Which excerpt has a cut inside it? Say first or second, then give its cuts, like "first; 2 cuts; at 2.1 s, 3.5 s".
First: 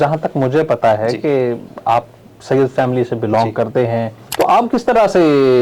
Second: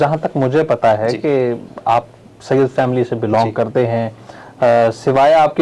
first; 1 cut; at 4.2 s